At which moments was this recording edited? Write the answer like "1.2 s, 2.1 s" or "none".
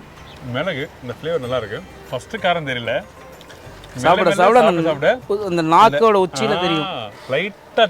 1.9 s